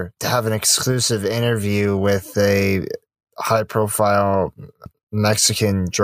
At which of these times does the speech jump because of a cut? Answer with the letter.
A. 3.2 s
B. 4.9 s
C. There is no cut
B